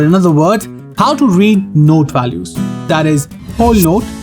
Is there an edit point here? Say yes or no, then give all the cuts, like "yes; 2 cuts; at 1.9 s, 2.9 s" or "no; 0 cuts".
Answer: yes; 1 cut; at 2.9 s